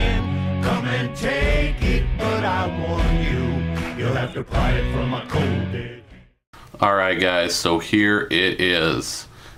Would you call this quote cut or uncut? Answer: uncut